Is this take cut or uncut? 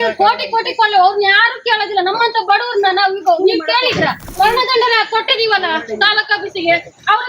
cut